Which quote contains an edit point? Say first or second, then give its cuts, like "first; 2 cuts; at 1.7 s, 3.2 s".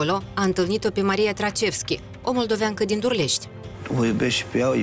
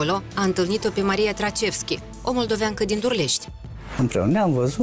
second; 1 cut; at 3.8 s